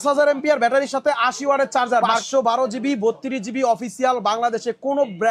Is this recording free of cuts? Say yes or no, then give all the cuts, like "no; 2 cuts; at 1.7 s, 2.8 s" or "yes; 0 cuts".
no; 1 cut; at 2.2 s